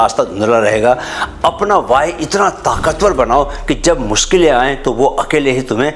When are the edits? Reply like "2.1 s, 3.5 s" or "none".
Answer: none

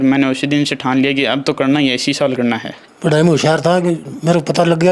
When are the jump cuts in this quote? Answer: 2.8 s

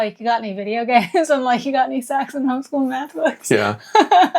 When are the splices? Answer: none

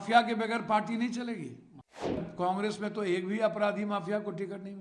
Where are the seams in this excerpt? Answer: 2.2 s

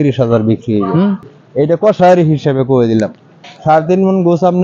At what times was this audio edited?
1.3 s

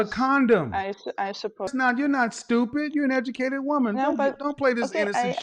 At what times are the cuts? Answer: 1.7 s

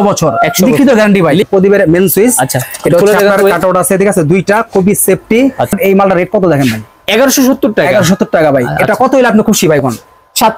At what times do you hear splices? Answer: 1.5 s, 5.7 s

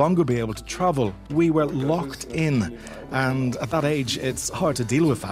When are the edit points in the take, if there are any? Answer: 1.2 s

